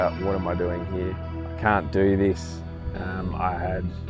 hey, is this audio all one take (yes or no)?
no